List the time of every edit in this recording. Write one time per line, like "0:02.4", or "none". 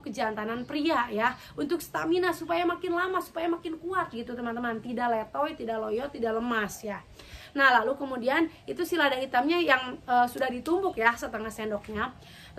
none